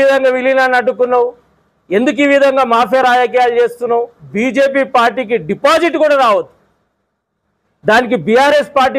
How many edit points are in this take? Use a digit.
1